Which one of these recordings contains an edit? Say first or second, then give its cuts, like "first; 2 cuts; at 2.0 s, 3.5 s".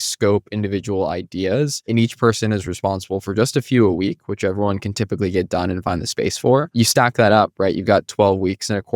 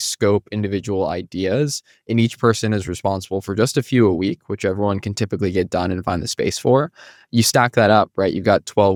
first; 2 cuts; at 1.8 s, 6.7 s